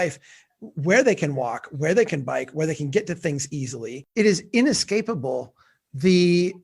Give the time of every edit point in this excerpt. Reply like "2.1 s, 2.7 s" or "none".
4.1 s